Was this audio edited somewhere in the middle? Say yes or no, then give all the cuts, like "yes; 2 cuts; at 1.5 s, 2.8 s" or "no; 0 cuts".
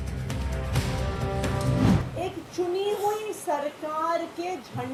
no; 0 cuts